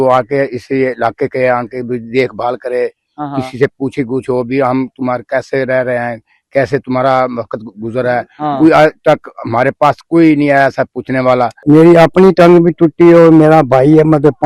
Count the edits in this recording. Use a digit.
1